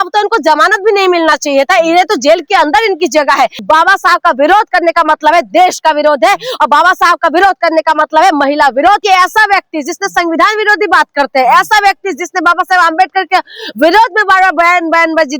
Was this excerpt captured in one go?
no; 2 cuts; at 3.6 s, 9.0 s

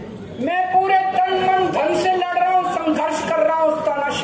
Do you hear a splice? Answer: no; 0 cuts

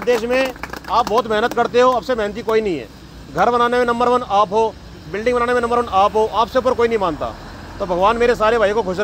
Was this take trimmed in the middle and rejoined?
no; 0 cuts

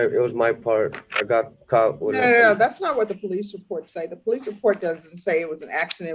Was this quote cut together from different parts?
no; 0 cuts

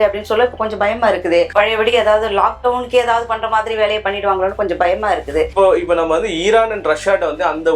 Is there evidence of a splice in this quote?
yes; 1 cut; at 5.5 s

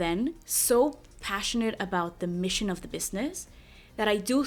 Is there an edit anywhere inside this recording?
no; 0 cuts

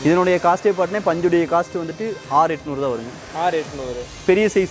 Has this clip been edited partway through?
no; 0 cuts

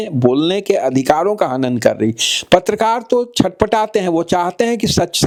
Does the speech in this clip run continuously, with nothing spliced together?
yes; 0 cuts

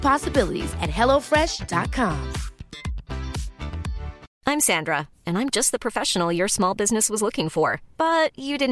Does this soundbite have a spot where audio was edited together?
yes; 1 cut; at 4.3 s

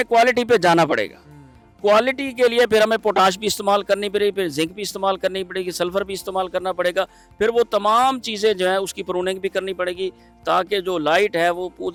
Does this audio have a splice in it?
no; 0 cuts

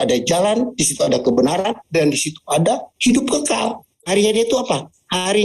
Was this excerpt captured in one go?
no; 1 cut; at 3.9 s

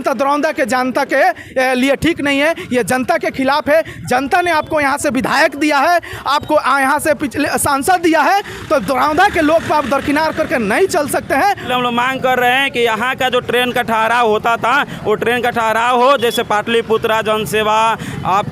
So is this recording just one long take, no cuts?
no; 1 cut; at 11.7 s

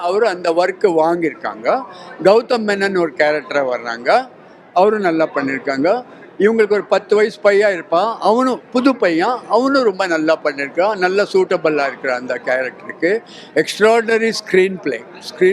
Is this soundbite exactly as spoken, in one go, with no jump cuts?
yes; 0 cuts

